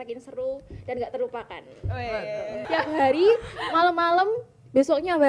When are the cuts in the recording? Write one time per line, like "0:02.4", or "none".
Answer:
0:02.7